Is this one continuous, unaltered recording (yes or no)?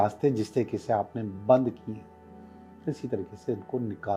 yes